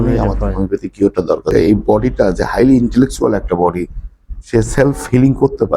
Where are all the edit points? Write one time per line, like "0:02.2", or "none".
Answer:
0:01.4